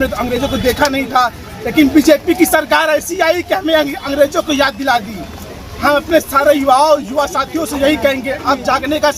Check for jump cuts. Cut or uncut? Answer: uncut